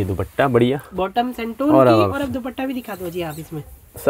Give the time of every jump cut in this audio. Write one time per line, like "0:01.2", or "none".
none